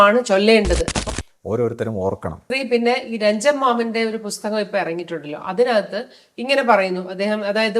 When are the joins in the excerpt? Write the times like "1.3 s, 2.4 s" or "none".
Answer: 1.0 s